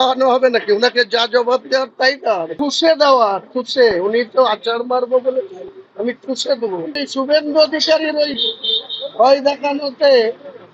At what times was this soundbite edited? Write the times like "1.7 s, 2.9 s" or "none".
2.5 s, 7.0 s